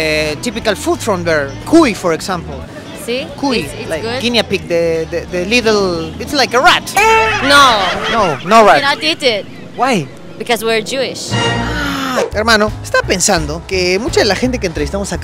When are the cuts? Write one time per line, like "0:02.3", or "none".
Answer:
none